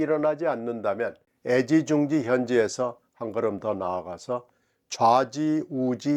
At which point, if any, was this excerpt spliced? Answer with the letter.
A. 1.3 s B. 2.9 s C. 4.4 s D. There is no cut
A